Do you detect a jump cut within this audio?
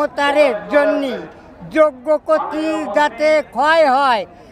no; 0 cuts

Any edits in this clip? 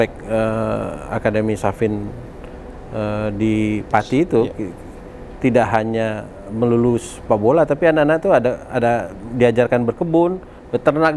no; 0 cuts

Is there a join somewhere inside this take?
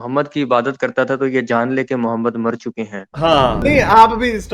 yes; 1 cut; at 3.6 s

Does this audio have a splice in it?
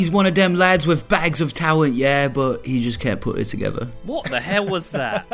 no; 0 cuts

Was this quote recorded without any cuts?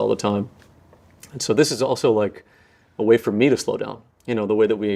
no; 1 cut; at 4.1 s

